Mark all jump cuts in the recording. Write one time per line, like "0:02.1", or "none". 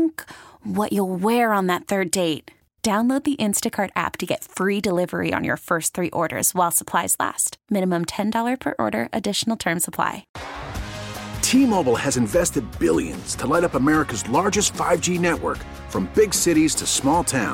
0:10.3

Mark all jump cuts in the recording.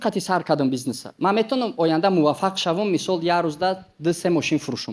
none

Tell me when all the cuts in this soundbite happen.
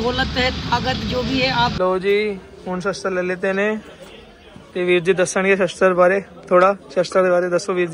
0:01.7

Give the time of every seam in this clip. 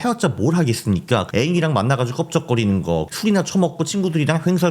0:01.3
0:03.1

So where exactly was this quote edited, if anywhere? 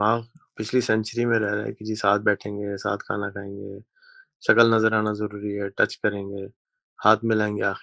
none

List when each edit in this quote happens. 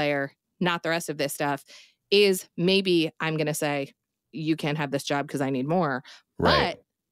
0:04.2

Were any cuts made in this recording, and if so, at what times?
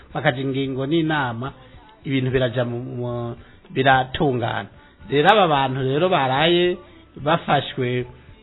none

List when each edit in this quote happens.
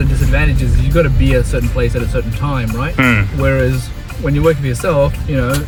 none

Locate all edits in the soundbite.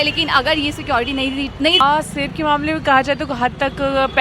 0:01.8

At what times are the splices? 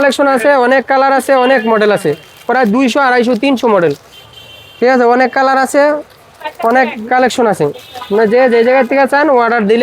none

